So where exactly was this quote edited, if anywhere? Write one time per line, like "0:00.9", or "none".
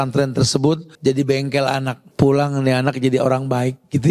0:00.9
0:02.0